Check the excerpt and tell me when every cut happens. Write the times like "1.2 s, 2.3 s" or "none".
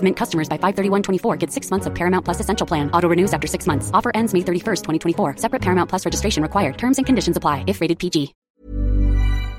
8.5 s